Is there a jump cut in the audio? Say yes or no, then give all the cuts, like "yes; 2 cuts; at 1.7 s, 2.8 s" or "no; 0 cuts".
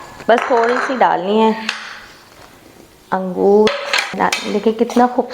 yes; 1 cut; at 4.1 s